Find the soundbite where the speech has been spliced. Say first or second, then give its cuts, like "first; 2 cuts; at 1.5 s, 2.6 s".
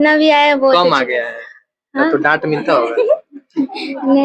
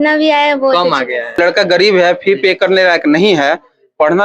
second; 1 cut; at 1.4 s